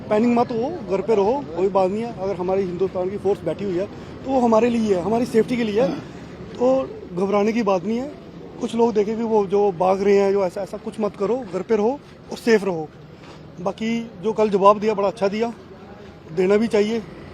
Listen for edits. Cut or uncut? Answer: uncut